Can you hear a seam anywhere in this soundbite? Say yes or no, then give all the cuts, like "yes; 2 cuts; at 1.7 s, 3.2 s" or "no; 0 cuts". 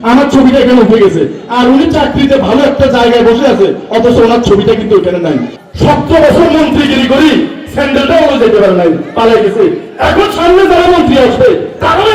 yes; 1 cut; at 5.5 s